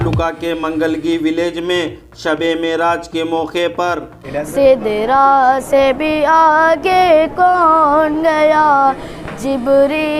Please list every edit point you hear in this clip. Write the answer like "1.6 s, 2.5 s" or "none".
4.2 s